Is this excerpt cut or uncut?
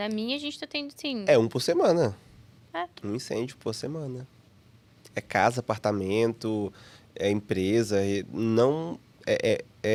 uncut